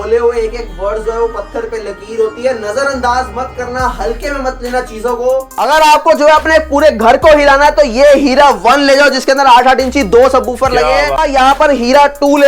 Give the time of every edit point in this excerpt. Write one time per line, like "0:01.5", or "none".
0:05.6
0:11.2